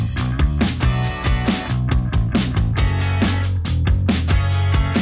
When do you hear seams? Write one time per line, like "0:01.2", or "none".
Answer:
0:01.7